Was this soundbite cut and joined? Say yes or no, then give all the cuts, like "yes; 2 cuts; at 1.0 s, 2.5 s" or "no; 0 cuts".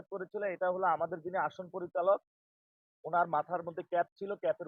no; 0 cuts